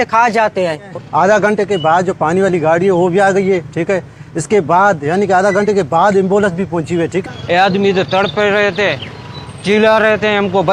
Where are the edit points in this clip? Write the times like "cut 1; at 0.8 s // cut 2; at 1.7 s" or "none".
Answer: cut 1; at 0.9 s // cut 2; at 7.2 s